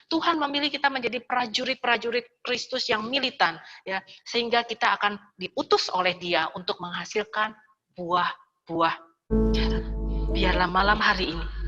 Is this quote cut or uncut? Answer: cut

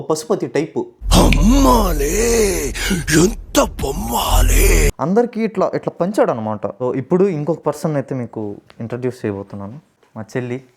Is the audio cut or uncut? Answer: cut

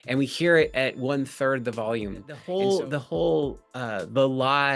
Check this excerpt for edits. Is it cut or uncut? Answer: cut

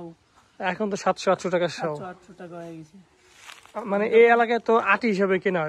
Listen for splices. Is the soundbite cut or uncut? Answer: uncut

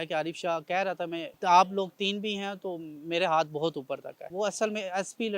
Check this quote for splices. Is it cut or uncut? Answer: cut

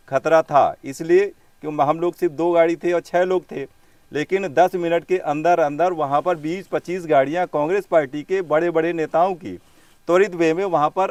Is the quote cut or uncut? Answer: uncut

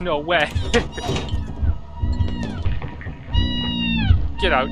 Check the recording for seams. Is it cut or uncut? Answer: cut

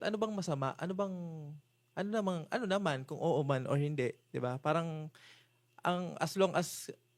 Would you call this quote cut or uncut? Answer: uncut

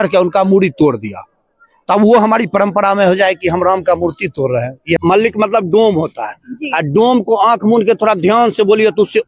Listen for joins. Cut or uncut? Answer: cut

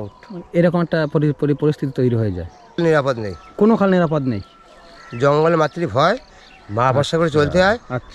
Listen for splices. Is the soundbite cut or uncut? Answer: cut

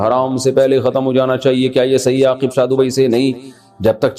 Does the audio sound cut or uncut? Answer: uncut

